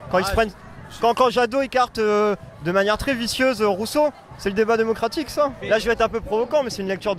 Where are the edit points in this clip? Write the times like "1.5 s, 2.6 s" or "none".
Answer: 5.6 s